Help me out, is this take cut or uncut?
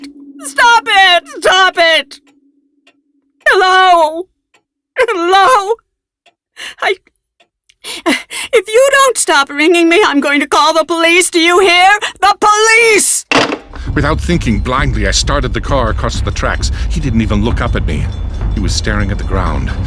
cut